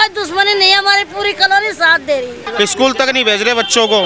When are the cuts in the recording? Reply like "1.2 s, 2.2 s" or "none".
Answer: 2.4 s